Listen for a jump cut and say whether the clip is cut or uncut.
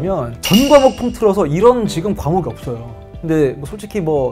cut